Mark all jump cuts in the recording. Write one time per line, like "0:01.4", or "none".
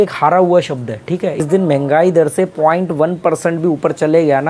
0:01.5